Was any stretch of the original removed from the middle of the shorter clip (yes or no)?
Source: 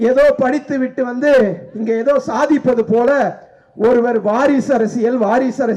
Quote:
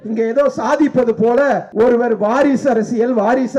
yes